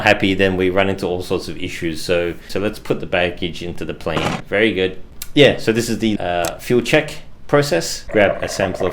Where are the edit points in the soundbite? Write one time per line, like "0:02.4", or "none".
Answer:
0:02.4
0:04.2
0:05.1
0:06.2
0:08.0